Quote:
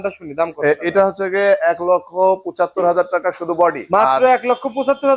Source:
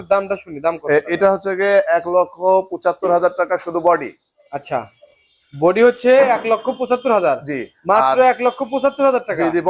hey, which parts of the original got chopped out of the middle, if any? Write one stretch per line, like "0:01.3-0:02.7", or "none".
0:04.1-0:07.8